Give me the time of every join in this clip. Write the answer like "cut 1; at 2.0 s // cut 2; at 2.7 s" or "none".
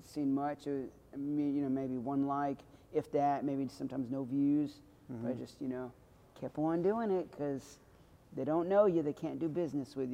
none